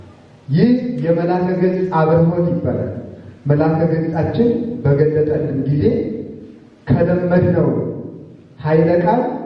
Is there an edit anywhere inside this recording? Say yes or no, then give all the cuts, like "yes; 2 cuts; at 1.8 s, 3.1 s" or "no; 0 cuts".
no; 0 cuts